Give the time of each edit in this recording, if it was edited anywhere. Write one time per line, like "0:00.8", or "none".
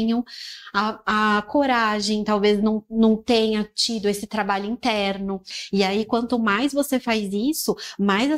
0:05.5